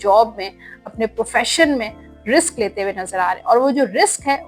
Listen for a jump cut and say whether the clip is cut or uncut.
uncut